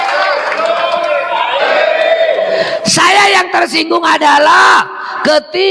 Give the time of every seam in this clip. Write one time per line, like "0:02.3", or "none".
0:01.6

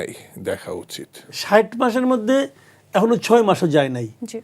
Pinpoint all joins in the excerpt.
0:01.4

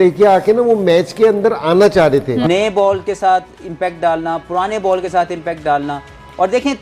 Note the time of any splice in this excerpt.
0:02.4

